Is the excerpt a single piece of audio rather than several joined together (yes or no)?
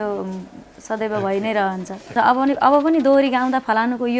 no